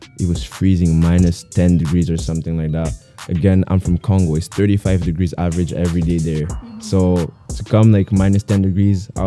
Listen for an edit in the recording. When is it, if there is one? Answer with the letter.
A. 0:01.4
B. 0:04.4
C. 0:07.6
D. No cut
D